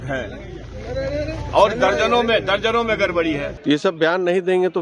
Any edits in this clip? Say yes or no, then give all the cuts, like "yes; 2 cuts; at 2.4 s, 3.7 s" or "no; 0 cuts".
yes; 1 cut; at 3.5 s